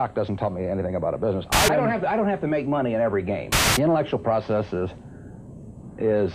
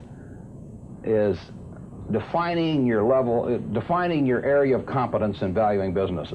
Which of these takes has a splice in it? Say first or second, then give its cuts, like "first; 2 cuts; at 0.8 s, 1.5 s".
first; 2 cuts; at 1.7 s, 3.6 s